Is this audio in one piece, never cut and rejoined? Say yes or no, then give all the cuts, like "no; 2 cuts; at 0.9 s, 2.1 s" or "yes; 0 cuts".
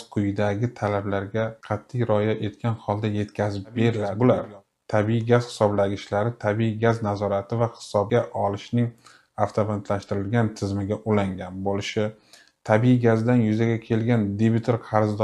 no; 1 cut; at 4.1 s